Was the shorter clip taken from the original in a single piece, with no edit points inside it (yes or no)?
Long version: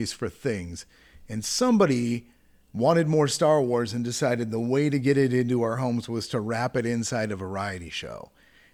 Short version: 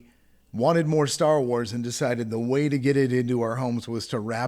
yes